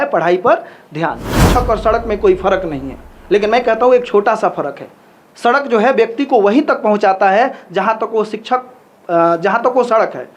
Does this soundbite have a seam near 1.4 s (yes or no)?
yes